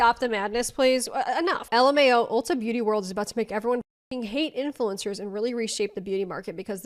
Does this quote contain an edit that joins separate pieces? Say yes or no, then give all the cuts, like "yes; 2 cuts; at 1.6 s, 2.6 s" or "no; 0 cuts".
no; 0 cuts